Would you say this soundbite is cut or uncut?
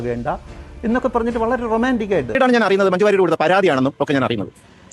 cut